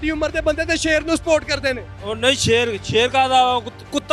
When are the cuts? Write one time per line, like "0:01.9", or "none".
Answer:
none